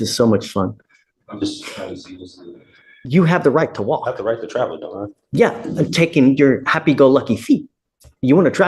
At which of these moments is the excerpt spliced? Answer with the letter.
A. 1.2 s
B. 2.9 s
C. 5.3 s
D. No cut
B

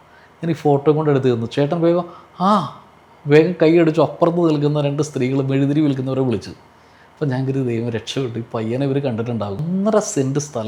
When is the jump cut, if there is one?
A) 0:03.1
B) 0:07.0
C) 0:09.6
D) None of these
C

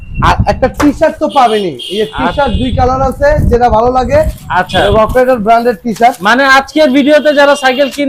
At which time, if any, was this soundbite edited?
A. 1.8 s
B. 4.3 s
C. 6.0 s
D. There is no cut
D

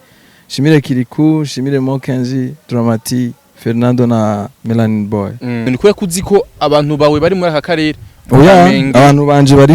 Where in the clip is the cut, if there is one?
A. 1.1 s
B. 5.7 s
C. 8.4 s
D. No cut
B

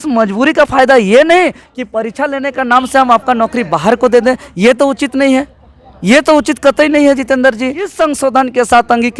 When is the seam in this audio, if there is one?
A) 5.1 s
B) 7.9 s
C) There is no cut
B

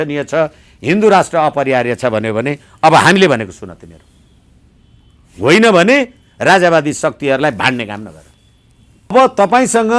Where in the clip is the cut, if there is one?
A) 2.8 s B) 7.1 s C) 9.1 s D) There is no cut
C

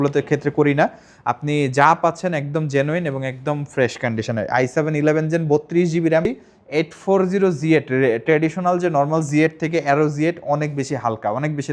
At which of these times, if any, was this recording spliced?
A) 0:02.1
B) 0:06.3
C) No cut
B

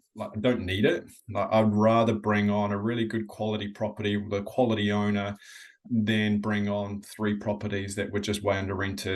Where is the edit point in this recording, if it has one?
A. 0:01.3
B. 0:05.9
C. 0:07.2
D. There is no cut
B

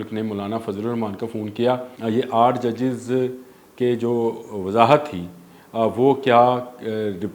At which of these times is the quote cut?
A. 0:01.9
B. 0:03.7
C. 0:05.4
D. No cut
A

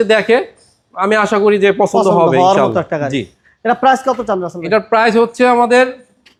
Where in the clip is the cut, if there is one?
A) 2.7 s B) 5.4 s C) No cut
C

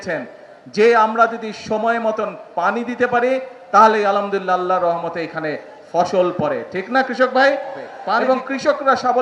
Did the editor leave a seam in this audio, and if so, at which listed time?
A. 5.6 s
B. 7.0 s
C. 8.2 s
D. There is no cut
C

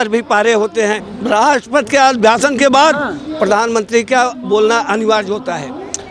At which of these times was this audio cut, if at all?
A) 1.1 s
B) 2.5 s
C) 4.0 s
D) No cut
A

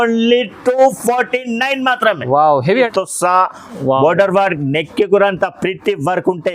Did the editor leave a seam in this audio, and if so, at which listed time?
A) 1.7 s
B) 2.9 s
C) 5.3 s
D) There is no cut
B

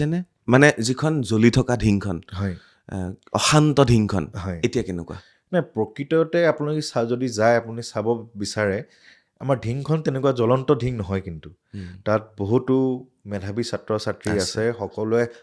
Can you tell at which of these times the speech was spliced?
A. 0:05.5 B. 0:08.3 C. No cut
C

